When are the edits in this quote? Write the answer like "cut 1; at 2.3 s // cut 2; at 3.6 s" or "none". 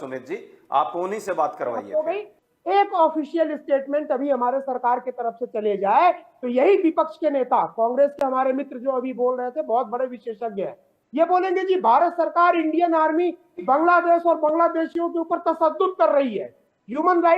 cut 1; at 2.4 s